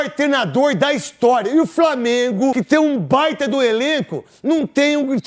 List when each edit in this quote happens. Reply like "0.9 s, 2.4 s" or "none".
2.6 s